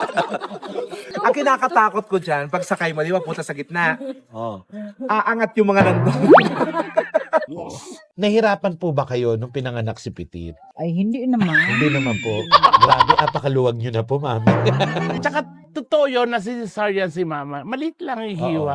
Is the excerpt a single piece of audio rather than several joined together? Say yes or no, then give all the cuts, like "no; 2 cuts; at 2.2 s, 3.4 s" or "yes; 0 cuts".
no; 3 cuts; at 1.0 s, 7.5 s, 15.2 s